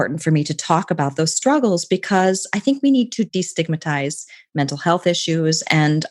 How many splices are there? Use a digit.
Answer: 1